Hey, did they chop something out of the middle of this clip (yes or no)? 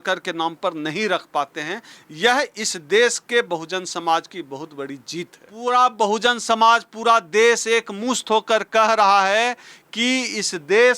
yes